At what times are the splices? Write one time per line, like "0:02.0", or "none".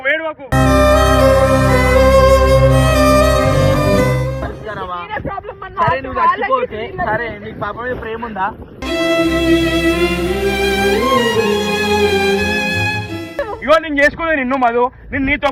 0:04.3
0:13.3